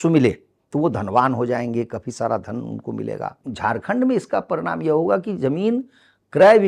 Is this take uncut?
no; 1 cut; at 3.4 s

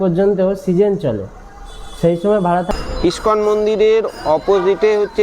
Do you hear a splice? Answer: yes; 1 cut; at 2.7 s

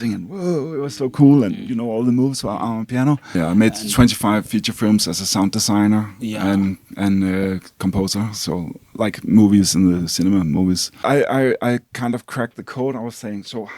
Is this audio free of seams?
no; 2 cuts; at 3.3 s, 11.0 s

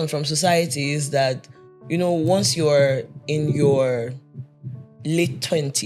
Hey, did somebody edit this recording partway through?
no; 0 cuts

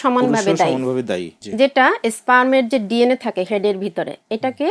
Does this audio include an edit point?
yes; 1 cut; at 1.3 s

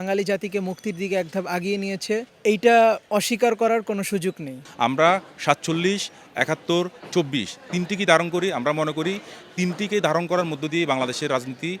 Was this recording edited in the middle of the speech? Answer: yes; 1 cut; at 4.5 s

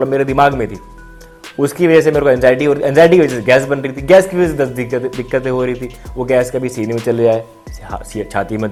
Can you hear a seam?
no; 0 cuts

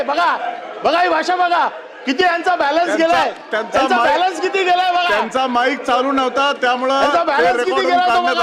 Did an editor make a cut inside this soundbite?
no; 0 cuts

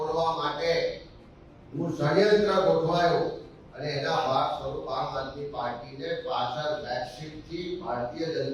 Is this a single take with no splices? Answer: yes; 0 cuts

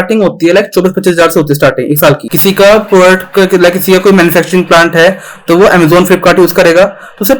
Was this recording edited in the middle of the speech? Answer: yes; 1 cut; at 2.3 s

